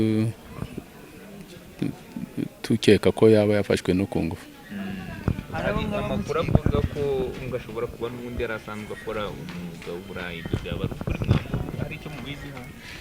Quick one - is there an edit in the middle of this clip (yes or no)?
no